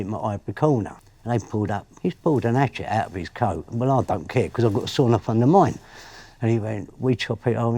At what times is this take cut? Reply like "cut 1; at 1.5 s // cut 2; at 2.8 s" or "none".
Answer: cut 1; at 1.8 s